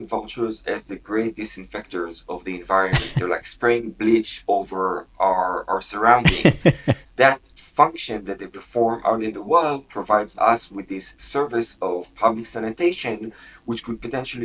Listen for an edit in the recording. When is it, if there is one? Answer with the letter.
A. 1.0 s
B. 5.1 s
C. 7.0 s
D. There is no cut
C